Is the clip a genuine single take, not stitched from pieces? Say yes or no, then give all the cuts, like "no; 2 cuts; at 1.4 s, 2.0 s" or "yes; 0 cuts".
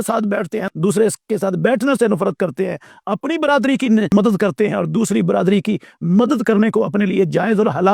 yes; 0 cuts